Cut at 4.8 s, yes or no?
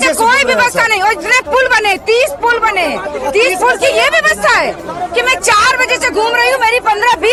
no